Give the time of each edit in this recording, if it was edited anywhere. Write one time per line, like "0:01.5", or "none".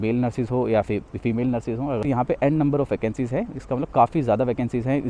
0:02.0